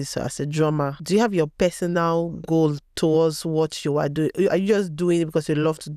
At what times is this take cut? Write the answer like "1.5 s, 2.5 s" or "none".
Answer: 1.0 s